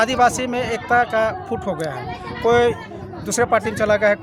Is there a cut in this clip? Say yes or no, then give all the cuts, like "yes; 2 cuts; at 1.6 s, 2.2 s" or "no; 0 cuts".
no; 0 cuts